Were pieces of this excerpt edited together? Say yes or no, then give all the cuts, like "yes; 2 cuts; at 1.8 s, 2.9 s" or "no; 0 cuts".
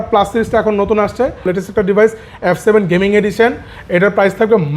yes; 1 cut; at 1.5 s